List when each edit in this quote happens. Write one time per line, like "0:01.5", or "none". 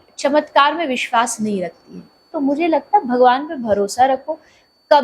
0:02.3